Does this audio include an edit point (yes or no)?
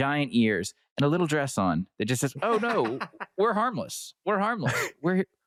no